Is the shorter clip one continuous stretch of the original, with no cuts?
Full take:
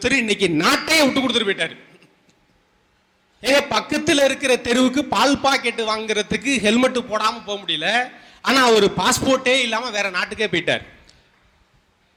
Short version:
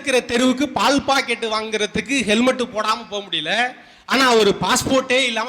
yes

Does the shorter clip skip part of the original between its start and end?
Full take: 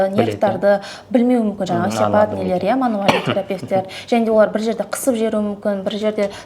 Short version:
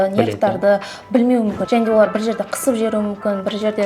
yes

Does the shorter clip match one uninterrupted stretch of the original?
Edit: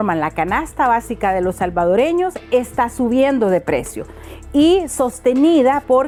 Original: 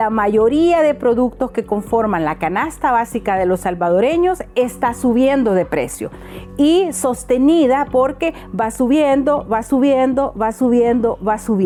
yes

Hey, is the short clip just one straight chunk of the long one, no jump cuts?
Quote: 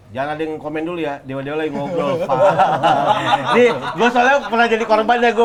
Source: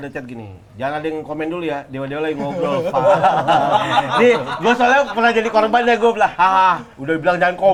yes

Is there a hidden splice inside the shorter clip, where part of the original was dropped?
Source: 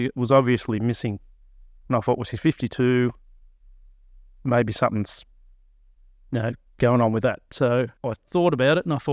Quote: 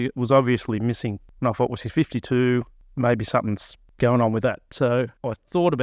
yes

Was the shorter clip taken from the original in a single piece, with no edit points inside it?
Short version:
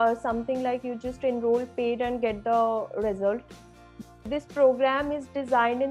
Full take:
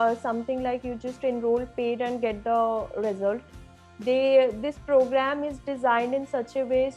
no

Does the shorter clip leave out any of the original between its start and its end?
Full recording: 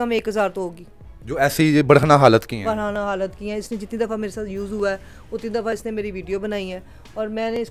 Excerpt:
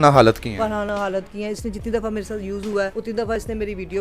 yes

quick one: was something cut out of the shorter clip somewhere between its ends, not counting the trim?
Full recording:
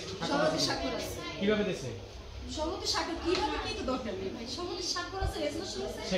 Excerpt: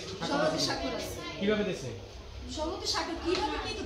no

